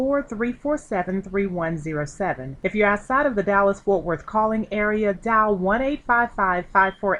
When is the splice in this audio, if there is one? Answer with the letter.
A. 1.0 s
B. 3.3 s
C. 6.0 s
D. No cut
D